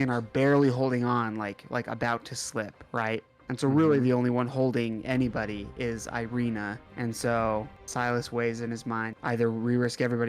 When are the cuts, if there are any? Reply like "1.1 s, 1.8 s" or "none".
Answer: 3.3 s, 6.8 s, 7.8 s, 9.1 s